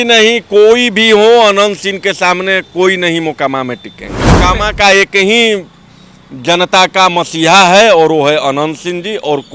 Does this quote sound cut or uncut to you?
cut